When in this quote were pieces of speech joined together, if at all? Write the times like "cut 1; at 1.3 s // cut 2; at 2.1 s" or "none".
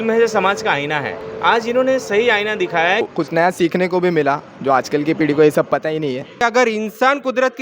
cut 1; at 1.2 s // cut 2; at 3.1 s // cut 3; at 6.4 s